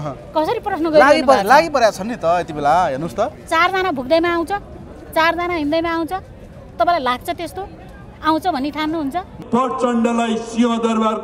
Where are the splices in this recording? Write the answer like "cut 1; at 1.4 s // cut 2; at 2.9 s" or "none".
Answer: cut 1; at 9.3 s